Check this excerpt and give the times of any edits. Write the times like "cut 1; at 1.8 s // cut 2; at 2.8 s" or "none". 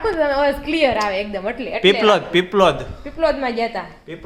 none